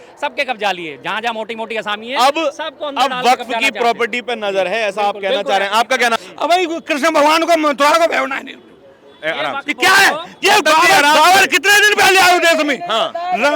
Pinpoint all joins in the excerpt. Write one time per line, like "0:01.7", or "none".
0:06.1